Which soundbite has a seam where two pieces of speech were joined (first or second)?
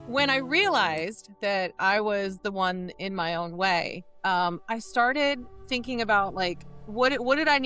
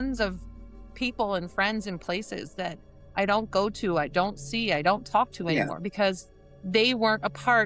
first